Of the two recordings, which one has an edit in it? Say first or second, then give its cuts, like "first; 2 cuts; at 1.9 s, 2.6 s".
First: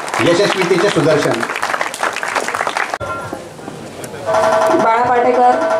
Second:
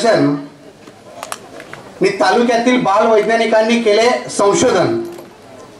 first; 1 cut; at 3.0 s